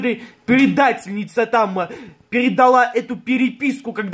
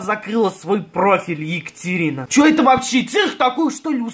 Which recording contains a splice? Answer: second; 1 cut; at 2.2 s

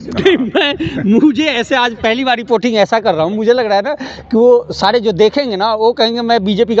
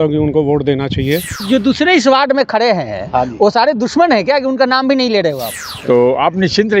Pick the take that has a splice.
second; 2 cuts; at 1.5 s, 5.5 s

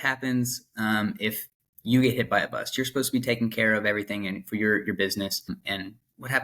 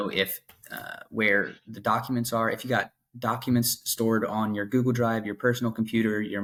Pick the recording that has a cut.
first; 1 cut; at 5.5 s

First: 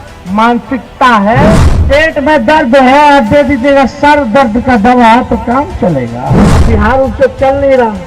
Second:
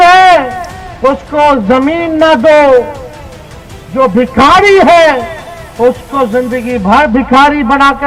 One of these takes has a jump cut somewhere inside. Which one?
first; 2 cuts; at 1.7 s, 6.4 s

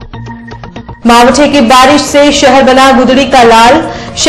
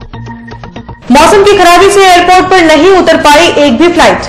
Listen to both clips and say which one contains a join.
first; 1 cut; at 1.0 s

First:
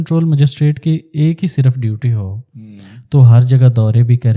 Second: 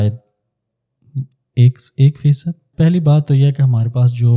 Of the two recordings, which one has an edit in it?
second; 1 cut; at 2.7 s

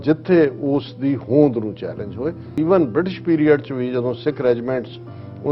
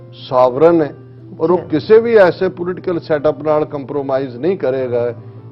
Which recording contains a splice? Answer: first; 1 cut; at 2.5 s

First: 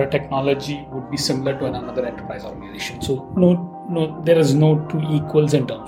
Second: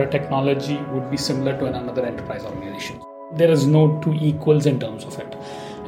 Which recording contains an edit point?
second; 1 cut; at 3.3 s

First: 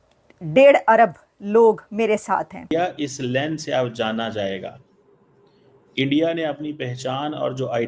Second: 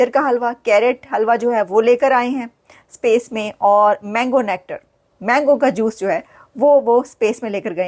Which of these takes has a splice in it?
first; 1 cut; at 2.7 s

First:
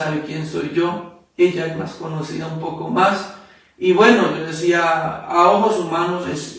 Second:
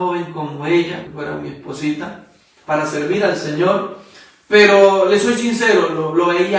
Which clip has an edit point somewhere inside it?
second; 1 cut; at 1.1 s

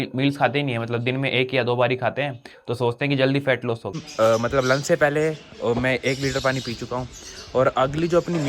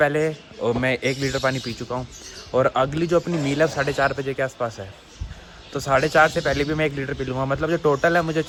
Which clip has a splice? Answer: first; 1 cut; at 4.0 s

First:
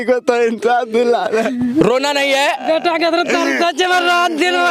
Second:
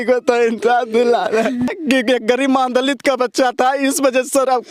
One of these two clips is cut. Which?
second; 1 cut; at 1.7 s

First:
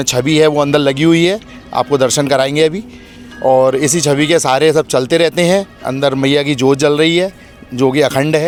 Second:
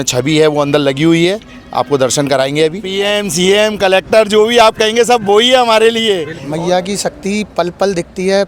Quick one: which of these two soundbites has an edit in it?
second; 2 cuts; at 2.9 s, 6.4 s

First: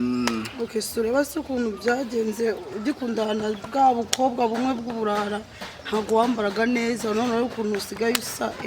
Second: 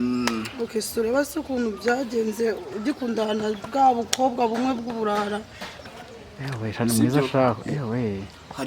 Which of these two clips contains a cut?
second; 1 cut; at 5.9 s

